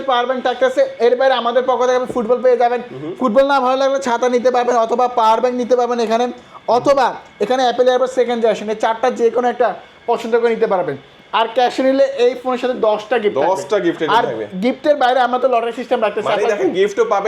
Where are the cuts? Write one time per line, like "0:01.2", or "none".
none